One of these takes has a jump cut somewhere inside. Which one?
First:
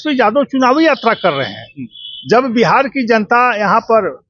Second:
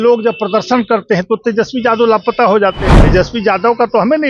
second; 1 cut; at 2.9 s

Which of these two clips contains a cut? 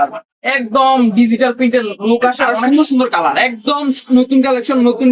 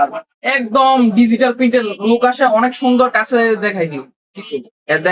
first; 1 cut; at 2.5 s

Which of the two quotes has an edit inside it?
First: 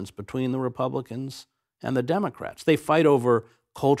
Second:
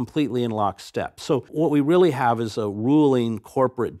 second; 1 cut; at 1.5 s

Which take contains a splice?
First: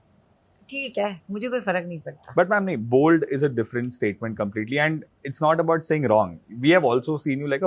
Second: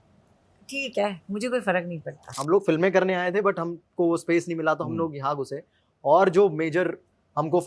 second; 1 cut; at 2.2 s

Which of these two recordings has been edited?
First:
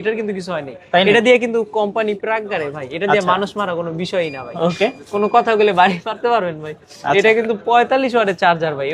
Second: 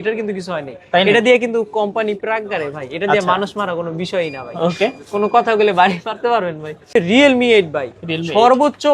second; 1 cut; at 7.0 s

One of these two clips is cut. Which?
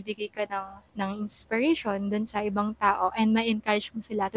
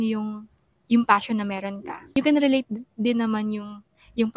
second; 1 cut; at 2.0 s

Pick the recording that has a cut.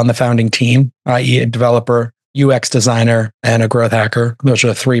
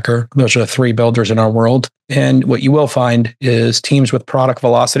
second; 1 cut; at 1.9 s

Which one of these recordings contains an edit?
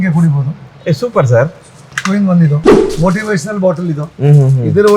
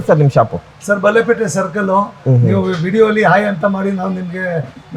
first; 1 cut; at 2.8 s

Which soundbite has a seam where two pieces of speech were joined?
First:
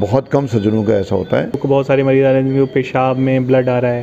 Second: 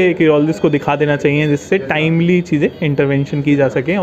first; 1 cut; at 1.6 s

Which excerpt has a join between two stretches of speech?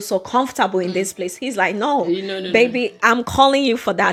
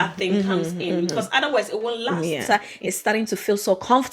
second; 1 cut; at 2.5 s

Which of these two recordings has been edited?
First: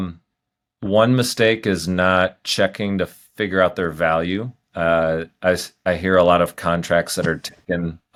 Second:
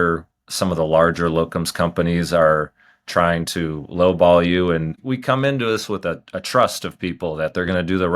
second; 1 cut; at 5.0 s

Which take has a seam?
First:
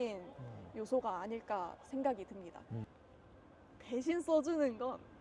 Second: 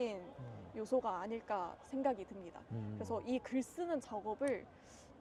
first; 1 cut; at 2.8 s

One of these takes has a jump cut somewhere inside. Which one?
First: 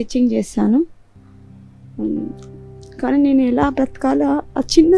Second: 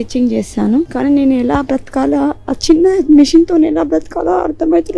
second; 1 cut; at 0.9 s

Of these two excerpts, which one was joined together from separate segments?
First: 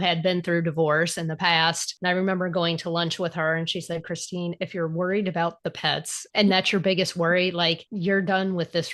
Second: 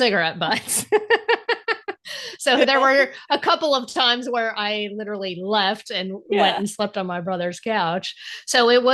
first; 3 cuts; at 1.9 s, 6.2 s, 7.9 s

